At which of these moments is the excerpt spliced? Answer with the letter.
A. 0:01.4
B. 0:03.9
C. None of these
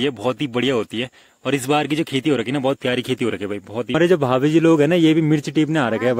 B